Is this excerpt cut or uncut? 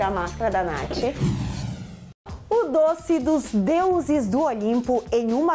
cut